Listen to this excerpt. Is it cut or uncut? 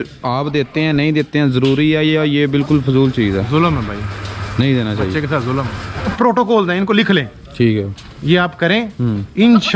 cut